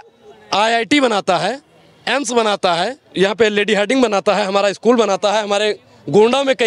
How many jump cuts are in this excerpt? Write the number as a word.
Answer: one